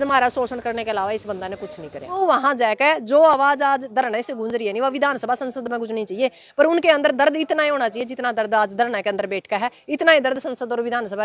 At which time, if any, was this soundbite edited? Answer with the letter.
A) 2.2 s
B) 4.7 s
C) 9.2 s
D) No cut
A